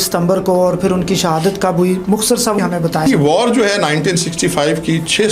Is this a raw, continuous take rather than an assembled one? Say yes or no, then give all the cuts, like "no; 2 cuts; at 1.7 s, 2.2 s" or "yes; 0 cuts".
no; 1 cut; at 2.6 s